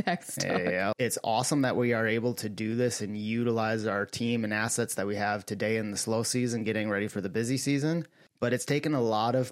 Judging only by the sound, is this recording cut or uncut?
cut